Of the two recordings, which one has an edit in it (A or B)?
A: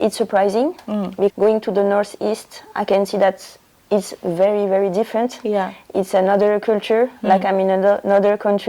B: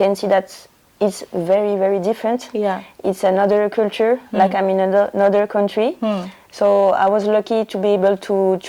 A